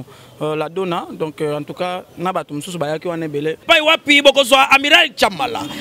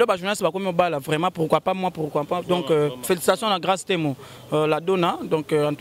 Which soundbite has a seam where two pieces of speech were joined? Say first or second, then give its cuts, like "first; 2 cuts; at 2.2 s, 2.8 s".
first; 1 cut; at 3.6 s